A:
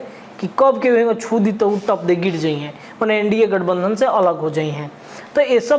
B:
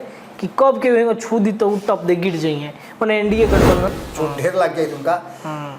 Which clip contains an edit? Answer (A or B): B